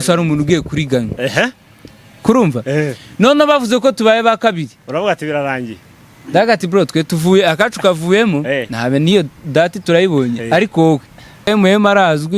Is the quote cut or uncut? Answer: cut